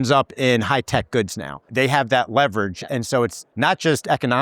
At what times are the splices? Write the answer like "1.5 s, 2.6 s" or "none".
1.6 s, 3.4 s